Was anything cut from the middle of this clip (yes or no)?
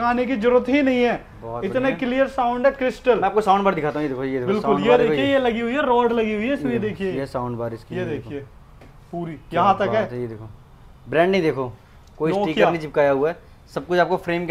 no